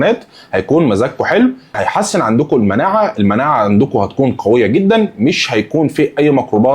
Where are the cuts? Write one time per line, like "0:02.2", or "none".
0:01.8